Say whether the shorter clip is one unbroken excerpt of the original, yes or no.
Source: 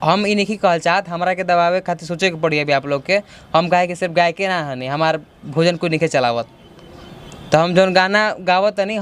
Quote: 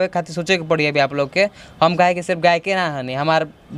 yes